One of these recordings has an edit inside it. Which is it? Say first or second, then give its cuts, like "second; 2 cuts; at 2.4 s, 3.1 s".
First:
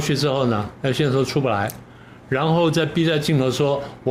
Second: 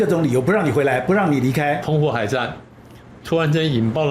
second; 1 cut; at 1.8 s